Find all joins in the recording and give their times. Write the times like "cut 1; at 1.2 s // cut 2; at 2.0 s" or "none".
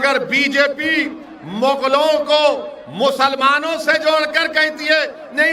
none